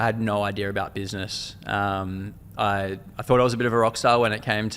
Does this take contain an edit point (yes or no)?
no